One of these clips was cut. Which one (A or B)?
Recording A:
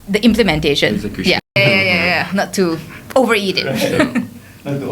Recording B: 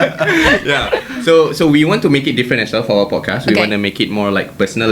A